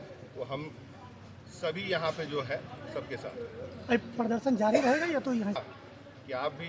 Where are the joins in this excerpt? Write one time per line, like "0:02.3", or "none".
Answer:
0:05.6